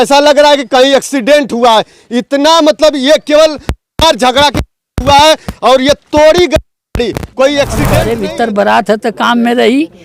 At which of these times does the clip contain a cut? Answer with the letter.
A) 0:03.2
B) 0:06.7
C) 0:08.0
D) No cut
C